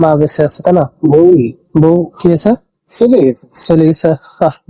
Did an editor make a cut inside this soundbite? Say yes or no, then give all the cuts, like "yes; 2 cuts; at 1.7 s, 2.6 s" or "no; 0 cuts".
no; 0 cuts